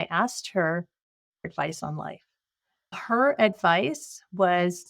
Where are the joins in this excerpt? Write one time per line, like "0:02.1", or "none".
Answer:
0:01.5
0:02.9